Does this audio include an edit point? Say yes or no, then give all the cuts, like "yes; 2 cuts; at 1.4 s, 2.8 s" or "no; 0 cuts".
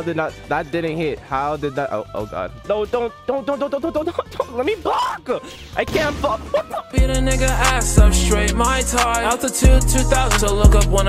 yes; 1 cut; at 6.9 s